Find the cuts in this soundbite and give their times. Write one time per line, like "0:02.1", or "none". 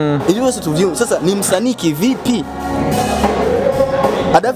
none